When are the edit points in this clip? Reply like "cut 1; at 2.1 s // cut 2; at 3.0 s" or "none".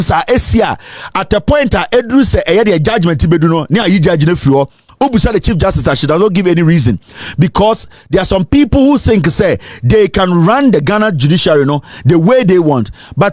none